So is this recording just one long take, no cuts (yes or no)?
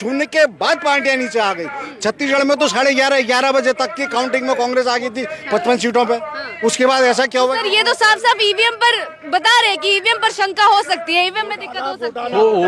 yes